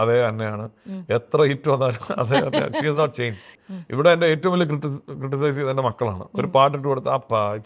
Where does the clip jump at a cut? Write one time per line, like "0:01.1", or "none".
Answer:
0:03.5